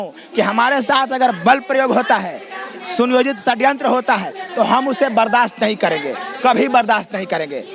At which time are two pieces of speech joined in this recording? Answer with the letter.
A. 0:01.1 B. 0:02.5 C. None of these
C